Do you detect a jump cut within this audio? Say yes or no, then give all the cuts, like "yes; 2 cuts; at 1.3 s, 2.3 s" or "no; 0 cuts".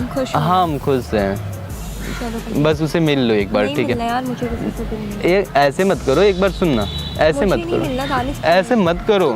no; 0 cuts